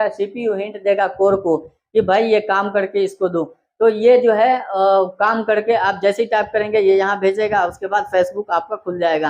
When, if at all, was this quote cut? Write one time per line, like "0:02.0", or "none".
none